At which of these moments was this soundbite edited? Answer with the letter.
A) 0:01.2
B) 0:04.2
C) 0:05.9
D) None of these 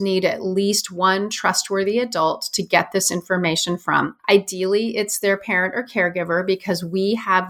B